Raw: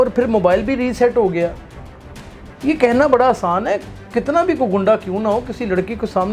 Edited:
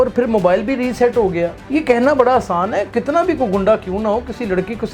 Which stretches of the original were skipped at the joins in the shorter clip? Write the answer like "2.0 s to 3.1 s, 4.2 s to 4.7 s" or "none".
1.6 s to 2.5 s, 3.9 s to 4.1 s